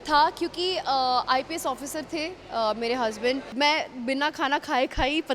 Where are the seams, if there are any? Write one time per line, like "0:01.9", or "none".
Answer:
0:03.5